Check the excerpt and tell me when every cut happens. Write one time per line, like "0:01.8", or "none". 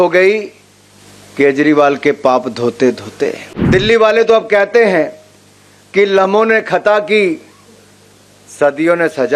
0:03.5